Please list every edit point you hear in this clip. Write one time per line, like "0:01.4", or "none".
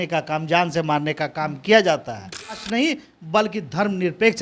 0:02.6